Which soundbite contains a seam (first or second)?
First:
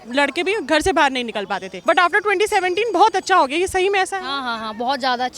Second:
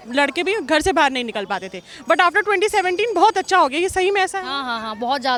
first